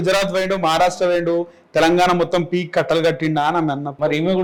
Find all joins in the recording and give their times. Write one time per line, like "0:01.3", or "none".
none